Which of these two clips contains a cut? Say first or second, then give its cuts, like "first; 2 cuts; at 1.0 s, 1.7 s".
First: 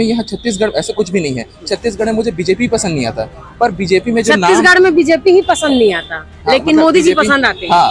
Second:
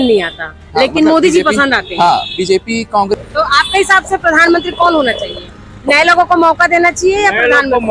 second; 1 cut; at 3.1 s